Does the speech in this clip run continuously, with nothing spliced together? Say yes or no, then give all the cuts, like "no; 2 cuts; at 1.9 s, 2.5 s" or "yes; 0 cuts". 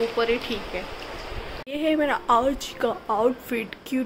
no; 1 cut; at 1.6 s